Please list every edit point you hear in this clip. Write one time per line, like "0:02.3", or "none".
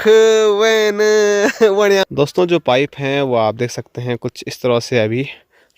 0:02.0